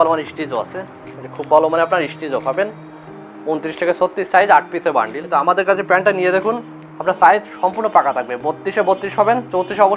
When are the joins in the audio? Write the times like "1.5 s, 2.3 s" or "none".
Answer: 5.2 s